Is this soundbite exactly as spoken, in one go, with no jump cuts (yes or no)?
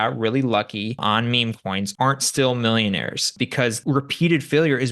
no